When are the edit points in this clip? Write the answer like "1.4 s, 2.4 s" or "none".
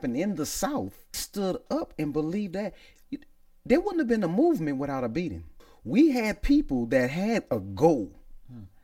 1.2 s, 5.7 s